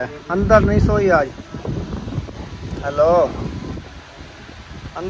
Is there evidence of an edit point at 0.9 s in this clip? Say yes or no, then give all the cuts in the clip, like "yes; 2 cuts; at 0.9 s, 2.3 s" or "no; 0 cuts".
no; 2 cuts; at 2.3 s, 3.9 s